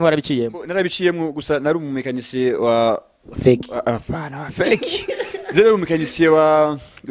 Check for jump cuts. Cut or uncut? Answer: uncut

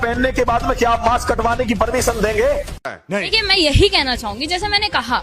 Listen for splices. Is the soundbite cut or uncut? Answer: cut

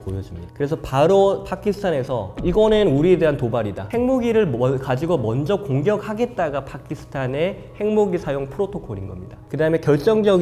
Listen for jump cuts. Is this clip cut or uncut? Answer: cut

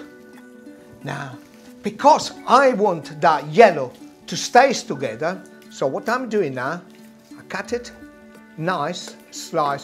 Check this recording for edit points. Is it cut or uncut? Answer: cut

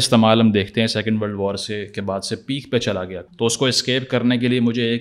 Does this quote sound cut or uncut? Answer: cut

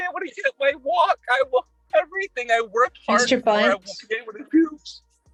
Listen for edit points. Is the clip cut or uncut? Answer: uncut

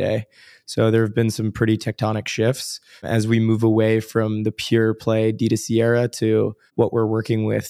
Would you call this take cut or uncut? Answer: cut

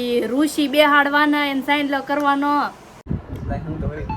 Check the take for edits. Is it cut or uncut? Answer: cut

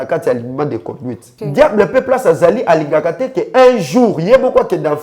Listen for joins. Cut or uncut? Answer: cut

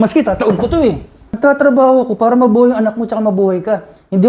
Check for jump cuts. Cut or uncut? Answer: cut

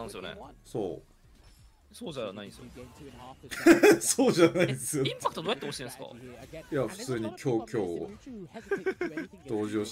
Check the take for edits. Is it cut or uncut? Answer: uncut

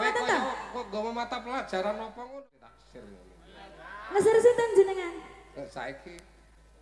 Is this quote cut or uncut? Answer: cut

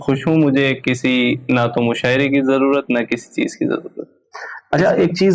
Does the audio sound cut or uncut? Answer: uncut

